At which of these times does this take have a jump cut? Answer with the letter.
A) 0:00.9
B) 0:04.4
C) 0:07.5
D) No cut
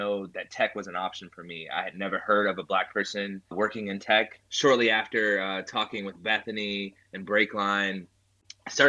B